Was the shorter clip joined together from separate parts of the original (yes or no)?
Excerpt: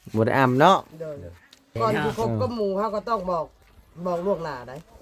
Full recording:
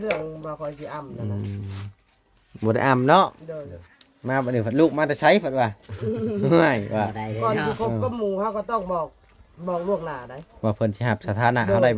yes